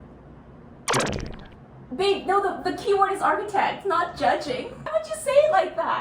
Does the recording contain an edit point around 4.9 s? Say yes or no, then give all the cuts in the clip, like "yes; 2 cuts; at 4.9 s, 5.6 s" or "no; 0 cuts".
yes; 1 cut; at 4.9 s